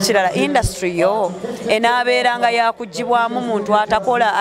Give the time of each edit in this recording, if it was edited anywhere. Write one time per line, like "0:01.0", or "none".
none

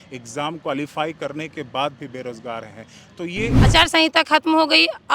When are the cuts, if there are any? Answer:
0:03.6

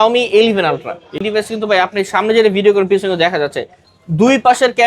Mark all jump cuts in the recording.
0:01.2

